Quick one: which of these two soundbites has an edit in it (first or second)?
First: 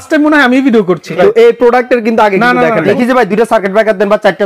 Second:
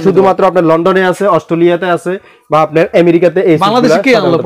first